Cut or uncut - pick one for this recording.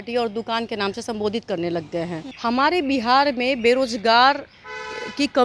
cut